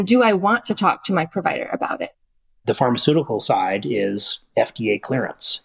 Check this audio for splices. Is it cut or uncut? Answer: cut